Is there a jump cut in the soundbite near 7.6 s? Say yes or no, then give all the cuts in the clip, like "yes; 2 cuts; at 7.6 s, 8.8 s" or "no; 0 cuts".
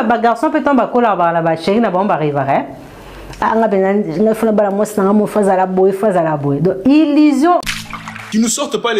yes; 1 cut; at 7.6 s